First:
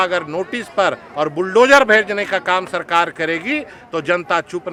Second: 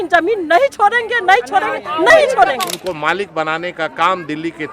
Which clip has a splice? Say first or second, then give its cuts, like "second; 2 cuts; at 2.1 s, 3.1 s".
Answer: second; 1 cut; at 2.7 s